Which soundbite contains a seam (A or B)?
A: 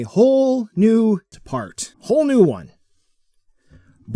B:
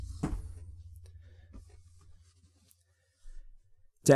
A